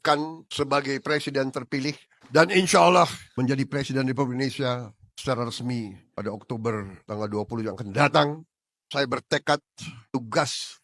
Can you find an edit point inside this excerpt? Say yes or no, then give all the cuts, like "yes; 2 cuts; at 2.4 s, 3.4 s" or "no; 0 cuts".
yes; 2 cuts; at 2.1 s, 3.2 s